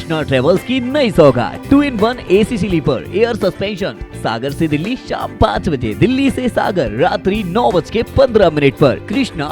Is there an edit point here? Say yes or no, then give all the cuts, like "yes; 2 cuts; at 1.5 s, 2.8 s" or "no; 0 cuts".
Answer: no; 0 cuts